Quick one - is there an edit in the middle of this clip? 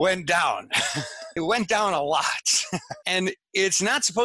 yes; 1 cut; at 1.2 s

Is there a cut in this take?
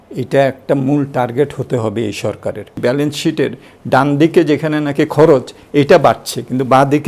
yes; 1 cut; at 2.8 s

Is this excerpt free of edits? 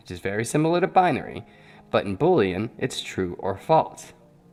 yes; 0 cuts

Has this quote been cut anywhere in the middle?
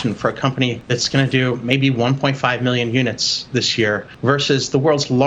yes; 2 cuts; at 0.8 s, 4.1 s

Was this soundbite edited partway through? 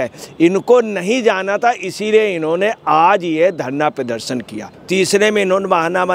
yes; 1 cut; at 4.7 s

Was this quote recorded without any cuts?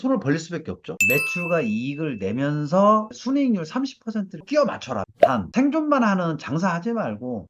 no; 3 cuts; at 0.9 s, 3.1 s, 4.4 s

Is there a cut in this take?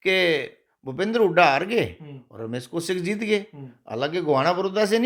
no; 0 cuts

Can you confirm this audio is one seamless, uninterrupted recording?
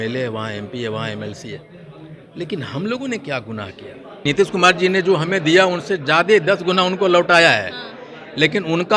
no; 1 cut; at 4.1 s

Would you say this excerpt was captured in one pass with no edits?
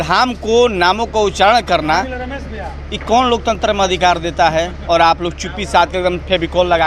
yes; 0 cuts

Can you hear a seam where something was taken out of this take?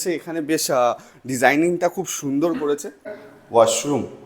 yes; 1 cut; at 3.0 s

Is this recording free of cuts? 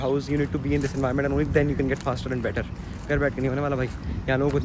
yes; 0 cuts

